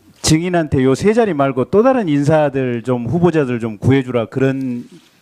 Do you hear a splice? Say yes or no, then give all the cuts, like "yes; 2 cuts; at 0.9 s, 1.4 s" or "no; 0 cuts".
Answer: yes; 1 cut; at 4.1 s